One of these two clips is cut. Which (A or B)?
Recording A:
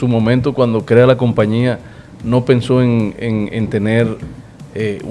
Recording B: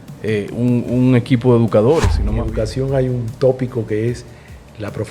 B